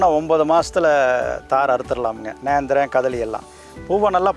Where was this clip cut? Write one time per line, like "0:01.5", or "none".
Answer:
none